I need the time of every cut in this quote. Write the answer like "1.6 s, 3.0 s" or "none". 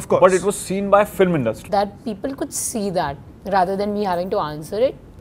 1.6 s